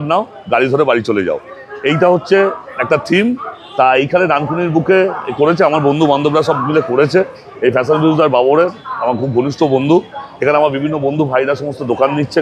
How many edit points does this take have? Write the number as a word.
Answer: zero